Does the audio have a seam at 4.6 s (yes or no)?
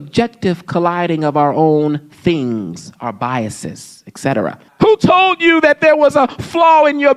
yes